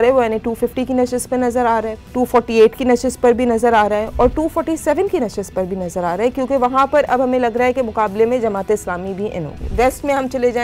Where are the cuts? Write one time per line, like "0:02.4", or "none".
0:02.0
0:09.7